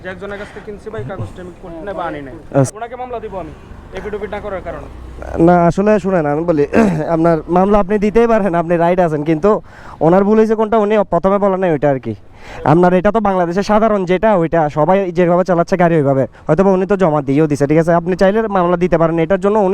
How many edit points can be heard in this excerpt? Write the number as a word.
one